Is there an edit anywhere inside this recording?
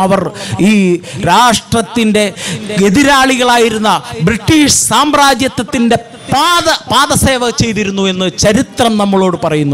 no; 0 cuts

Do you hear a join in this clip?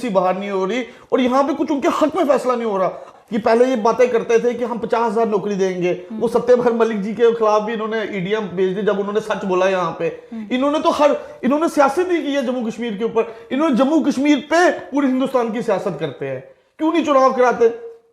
yes; 1 cut; at 3.1 s

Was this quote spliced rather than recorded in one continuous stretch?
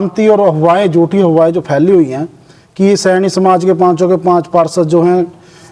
no; 0 cuts

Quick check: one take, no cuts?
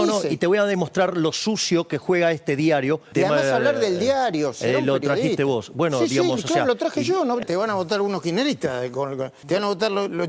no; 3 cuts; at 3.1 s, 7.4 s, 9.3 s

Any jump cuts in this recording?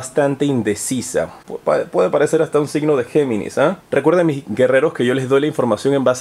no; 0 cuts

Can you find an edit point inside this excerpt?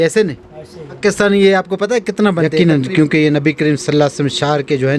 yes; 2 cuts; at 1.0 s, 2.5 s

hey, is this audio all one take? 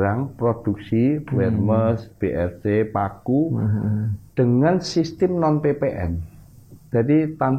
yes; 0 cuts

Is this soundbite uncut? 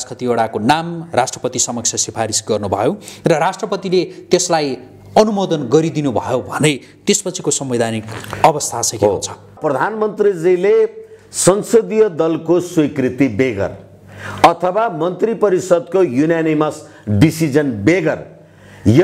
no; 1 cut; at 9.6 s

